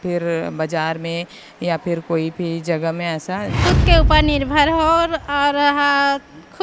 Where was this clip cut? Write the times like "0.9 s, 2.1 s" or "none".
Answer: 3.5 s